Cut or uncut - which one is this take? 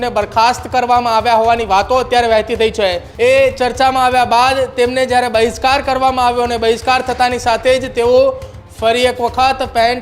cut